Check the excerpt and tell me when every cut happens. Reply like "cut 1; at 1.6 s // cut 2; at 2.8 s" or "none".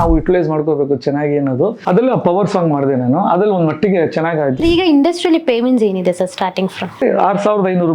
cut 1; at 1.8 s // cut 2; at 4.6 s // cut 3; at 7.0 s

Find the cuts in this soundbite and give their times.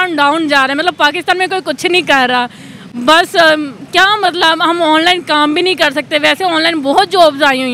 none

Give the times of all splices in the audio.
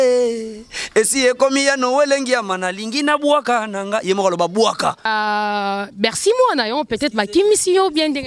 cut 1; at 5.1 s

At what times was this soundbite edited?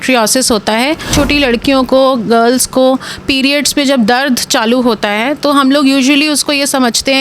cut 1; at 1.1 s

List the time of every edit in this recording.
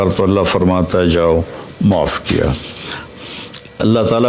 cut 1; at 3.1 s

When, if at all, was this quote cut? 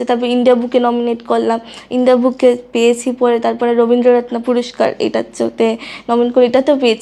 none

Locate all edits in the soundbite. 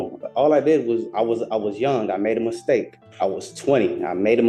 cut 1; at 3.0 s

